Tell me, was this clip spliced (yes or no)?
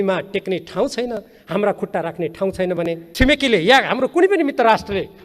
yes